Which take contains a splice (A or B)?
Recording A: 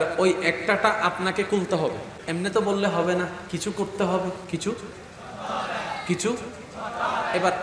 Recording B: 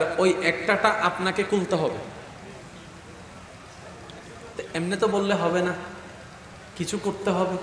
A